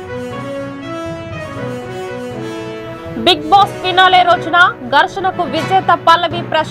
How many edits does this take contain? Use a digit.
0